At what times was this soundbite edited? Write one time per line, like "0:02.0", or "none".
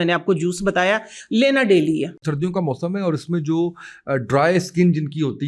0:02.2